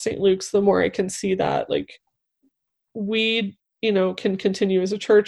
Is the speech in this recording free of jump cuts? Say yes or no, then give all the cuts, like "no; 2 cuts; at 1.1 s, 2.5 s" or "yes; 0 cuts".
yes; 0 cuts